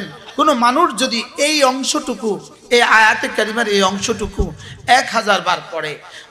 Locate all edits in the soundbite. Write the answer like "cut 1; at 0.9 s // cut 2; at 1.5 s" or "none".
none